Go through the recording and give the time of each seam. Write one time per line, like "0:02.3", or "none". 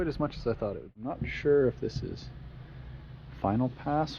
0:01.0